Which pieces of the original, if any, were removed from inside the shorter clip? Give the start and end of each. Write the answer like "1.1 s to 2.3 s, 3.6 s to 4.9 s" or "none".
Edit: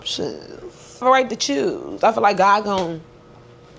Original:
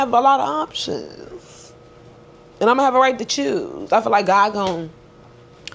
1.7 s to 2.9 s